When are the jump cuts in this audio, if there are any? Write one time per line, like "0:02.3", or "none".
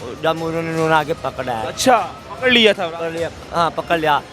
none